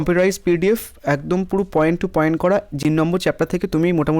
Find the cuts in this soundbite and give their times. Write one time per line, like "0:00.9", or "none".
0:02.8